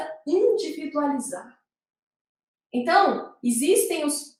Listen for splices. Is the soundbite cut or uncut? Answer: uncut